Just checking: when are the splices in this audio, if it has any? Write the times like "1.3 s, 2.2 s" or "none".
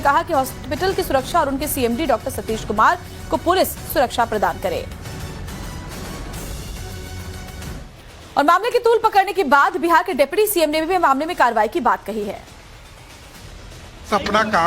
2.4 s